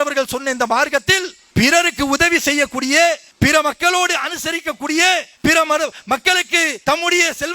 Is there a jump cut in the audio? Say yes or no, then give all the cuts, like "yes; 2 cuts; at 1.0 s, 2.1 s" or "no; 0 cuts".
yes; 2 cuts; at 1.3 s, 3.3 s